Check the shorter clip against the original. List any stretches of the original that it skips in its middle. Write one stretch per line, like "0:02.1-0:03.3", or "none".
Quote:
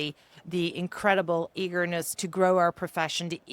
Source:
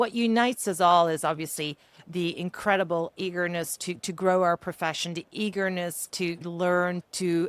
0:03.8-0:04.0

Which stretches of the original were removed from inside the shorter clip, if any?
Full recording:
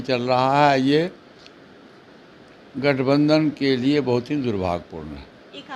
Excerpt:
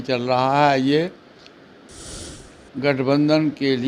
none

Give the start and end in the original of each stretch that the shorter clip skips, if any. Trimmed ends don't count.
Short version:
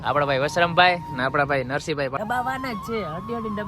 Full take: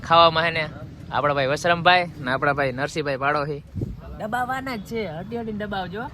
0:03.2-0:04.2

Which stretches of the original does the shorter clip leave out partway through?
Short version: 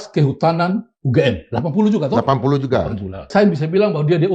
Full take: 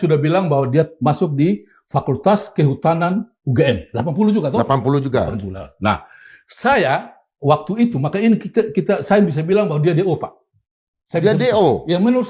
0:05.7-0:09.0

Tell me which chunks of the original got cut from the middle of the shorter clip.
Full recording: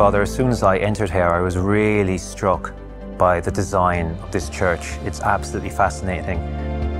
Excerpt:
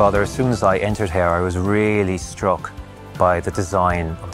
none

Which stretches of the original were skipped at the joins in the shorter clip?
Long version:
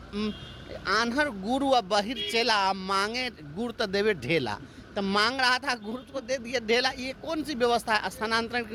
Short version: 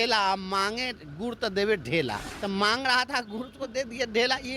0:04.6-0:04.8

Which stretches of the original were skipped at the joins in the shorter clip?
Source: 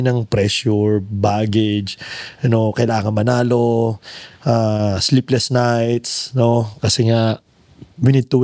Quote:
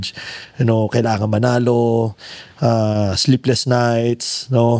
none

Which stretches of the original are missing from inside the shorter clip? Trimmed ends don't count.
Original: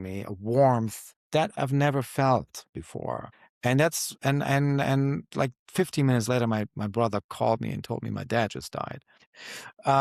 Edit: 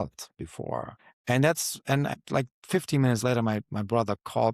0:04.5-0:05.2

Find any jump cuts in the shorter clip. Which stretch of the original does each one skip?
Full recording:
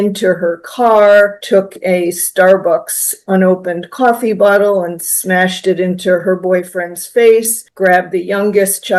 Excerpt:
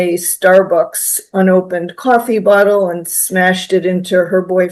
none

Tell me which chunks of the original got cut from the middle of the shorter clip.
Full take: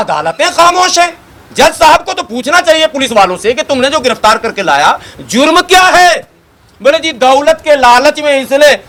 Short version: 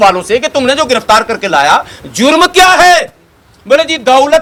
none

